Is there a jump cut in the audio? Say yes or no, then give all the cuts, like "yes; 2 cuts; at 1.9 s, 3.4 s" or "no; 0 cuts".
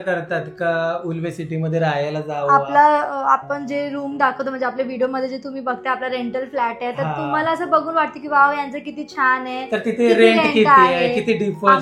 no; 0 cuts